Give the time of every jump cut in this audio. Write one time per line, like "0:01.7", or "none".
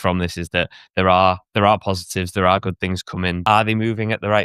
0:03.4